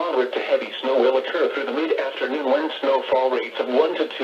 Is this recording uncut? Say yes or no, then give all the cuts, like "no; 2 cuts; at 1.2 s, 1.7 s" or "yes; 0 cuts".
yes; 0 cuts